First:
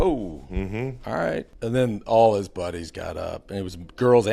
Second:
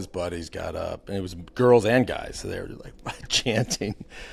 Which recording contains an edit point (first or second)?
first